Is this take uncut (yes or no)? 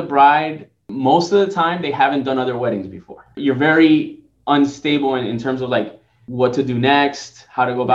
no